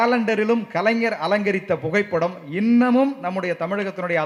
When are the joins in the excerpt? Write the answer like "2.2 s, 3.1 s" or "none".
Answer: none